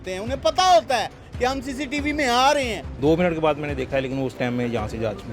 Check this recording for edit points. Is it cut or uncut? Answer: cut